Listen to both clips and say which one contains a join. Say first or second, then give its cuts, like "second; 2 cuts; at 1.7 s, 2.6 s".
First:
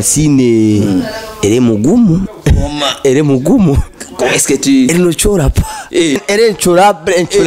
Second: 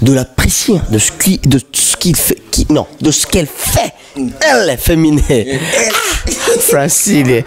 first; 1 cut; at 6.2 s